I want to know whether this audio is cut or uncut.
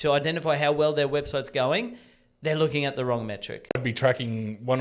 cut